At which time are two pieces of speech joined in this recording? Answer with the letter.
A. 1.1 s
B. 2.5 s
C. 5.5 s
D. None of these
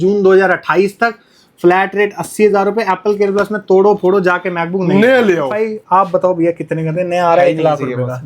C